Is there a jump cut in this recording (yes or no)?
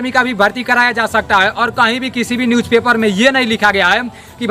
no